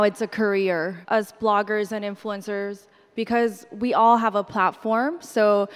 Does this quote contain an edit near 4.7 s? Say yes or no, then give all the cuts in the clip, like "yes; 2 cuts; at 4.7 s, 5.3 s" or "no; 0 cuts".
no; 1 cut; at 1.0 s